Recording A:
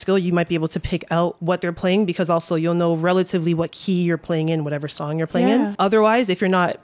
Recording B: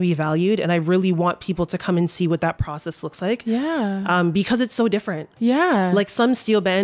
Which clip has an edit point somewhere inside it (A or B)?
A